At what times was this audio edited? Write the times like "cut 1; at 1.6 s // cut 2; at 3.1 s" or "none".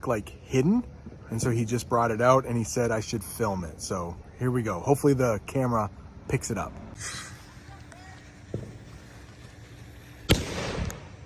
cut 1; at 7.0 s // cut 2; at 10.3 s

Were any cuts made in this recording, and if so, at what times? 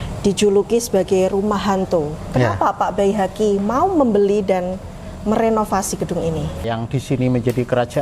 cut 1; at 6.7 s

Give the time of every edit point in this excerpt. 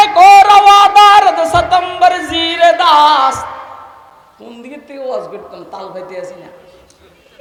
none

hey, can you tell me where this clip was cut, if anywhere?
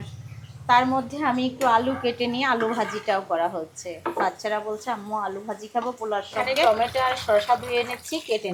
none

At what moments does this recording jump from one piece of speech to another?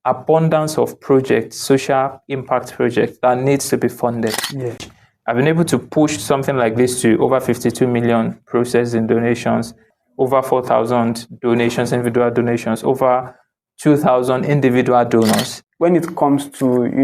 cut 1; at 4.9 s // cut 2; at 15.6 s

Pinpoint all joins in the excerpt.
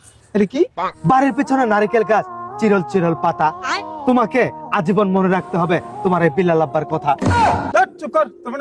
cut 1; at 7.6 s

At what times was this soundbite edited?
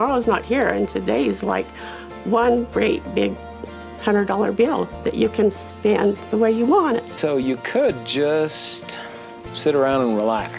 cut 1; at 7.1 s

